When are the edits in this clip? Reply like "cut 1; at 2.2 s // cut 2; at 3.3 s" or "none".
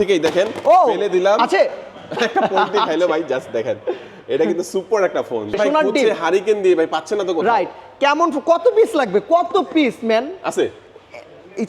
cut 1; at 5.6 s